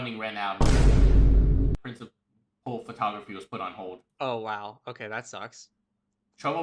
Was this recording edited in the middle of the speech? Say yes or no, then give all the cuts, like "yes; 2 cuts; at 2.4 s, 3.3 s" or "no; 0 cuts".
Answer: no; 0 cuts